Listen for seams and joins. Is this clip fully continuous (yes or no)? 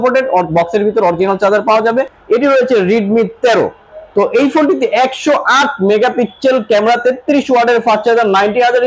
no